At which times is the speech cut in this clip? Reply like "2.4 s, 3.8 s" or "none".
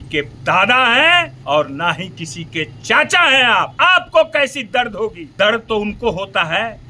1.4 s, 3.7 s, 5.2 s